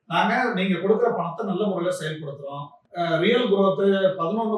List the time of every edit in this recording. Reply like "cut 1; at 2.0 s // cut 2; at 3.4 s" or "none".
cut 1; at 2.8 s